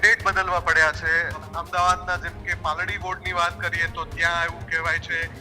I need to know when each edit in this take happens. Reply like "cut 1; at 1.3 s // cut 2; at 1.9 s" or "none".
cut 1; at 1.5 s